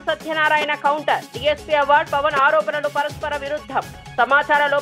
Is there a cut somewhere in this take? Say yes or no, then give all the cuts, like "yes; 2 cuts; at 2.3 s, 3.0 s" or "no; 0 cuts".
no; 0 cuts